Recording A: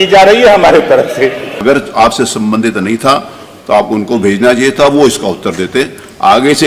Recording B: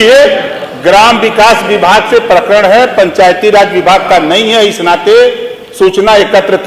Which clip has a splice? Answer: A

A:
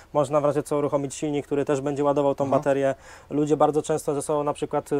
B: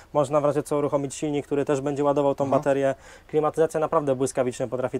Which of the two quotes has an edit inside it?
B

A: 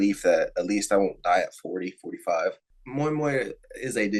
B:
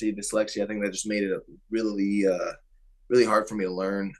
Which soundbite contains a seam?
A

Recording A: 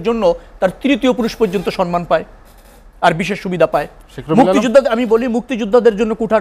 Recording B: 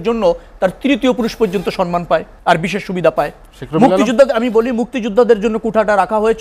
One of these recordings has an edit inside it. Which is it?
B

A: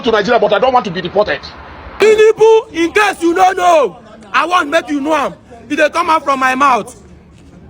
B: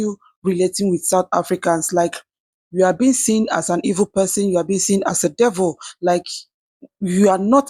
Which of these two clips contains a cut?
A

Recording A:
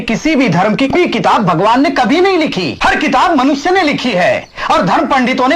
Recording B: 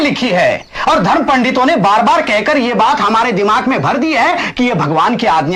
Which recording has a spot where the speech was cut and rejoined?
A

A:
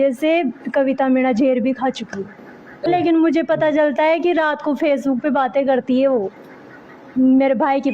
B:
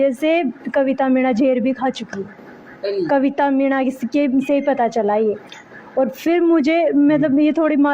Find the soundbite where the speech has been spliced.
A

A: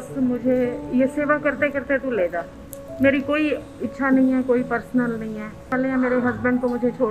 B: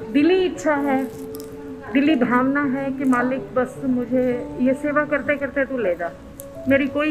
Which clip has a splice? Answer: A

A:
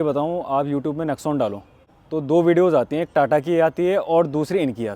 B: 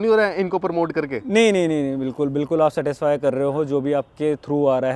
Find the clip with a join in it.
A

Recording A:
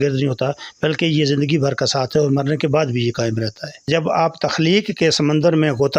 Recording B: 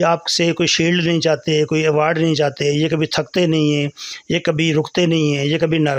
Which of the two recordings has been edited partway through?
A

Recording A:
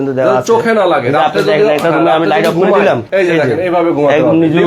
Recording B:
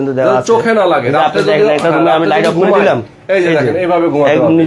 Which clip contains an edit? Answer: A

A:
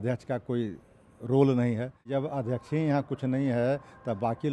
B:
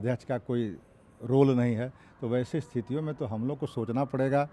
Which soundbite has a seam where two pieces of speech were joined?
A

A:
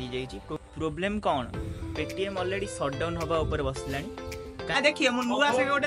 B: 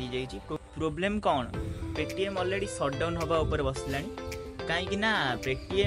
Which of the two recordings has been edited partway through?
A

